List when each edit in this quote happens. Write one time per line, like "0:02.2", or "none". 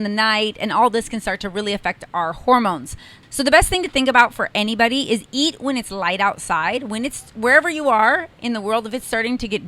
0:03.1